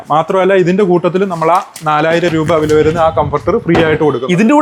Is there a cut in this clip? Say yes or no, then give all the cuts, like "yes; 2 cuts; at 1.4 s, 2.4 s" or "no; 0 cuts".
no; 0 cuts